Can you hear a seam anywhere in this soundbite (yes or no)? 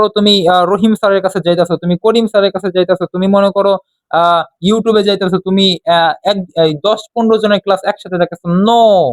no